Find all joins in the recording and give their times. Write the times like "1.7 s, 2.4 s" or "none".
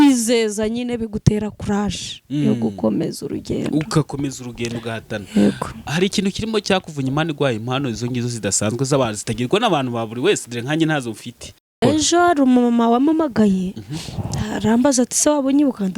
11.7 s